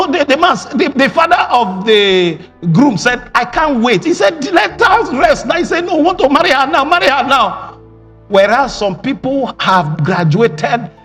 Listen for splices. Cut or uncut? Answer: uncut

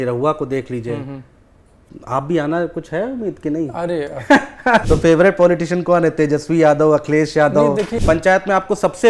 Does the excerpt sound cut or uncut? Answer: cut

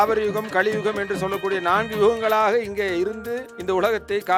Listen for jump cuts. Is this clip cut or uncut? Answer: uncut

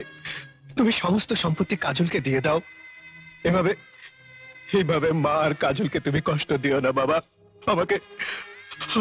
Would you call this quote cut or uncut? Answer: uncut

